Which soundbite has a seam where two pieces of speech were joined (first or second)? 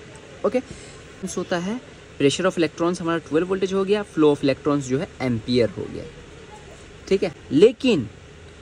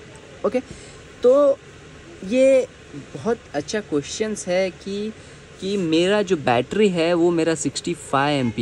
first